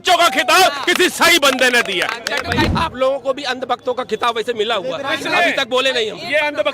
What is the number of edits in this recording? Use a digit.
1